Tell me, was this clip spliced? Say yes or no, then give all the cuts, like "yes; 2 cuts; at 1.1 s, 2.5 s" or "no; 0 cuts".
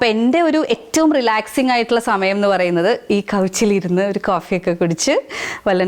no; 0 cuts